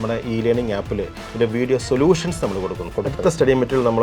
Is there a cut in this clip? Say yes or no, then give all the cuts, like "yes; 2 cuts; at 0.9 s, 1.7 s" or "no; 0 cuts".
yes; 1 cut; at 2.9 s